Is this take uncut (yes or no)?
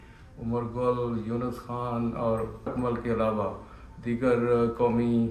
yes